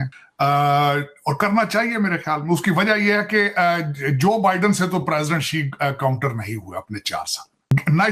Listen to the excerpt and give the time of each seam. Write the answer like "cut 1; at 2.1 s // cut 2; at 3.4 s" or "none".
none